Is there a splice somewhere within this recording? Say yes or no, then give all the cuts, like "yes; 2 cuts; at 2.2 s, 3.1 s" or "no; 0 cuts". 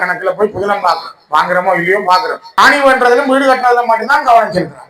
yes; 1 cut; at 2.4 s